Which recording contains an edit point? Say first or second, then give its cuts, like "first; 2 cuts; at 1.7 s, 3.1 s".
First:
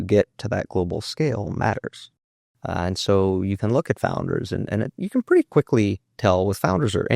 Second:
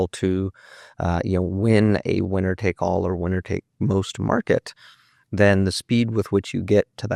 first; 1 cut; at 2.1 s